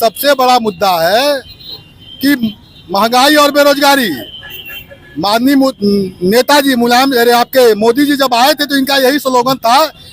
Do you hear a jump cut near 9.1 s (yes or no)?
no